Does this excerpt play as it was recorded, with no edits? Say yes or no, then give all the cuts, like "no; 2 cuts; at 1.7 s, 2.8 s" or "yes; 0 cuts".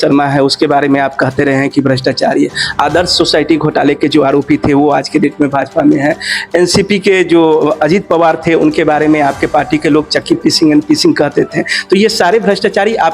yes; 0 cuts